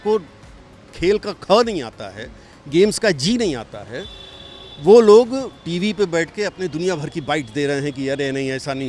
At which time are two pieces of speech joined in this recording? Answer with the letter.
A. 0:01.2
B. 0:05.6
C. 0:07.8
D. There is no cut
D